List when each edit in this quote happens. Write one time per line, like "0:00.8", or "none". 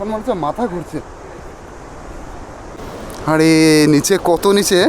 0:02.8